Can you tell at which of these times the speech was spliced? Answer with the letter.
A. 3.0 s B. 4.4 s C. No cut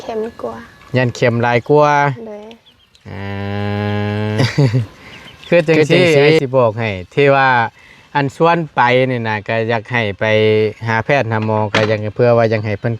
B